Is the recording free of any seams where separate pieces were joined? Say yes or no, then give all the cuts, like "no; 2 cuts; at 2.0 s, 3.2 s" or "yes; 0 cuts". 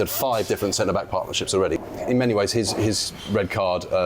no; 1 cut; at 1.8 s